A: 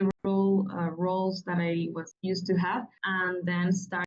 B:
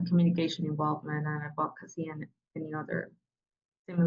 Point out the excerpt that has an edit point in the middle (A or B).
A